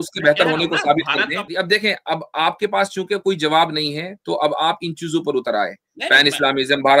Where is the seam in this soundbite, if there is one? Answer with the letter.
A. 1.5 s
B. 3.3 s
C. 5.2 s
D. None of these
A